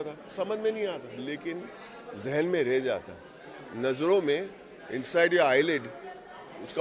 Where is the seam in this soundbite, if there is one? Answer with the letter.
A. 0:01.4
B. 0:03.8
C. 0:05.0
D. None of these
D